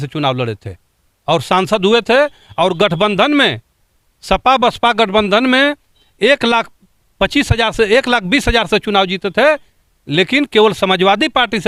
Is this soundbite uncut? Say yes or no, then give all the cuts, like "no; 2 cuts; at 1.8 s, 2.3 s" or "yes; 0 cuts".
yes; 0 cuts